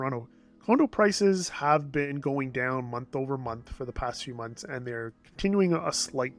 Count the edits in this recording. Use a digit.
0